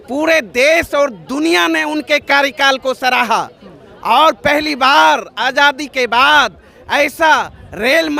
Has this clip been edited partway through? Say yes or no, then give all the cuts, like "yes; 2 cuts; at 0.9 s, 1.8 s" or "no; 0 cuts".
no; 0 cuts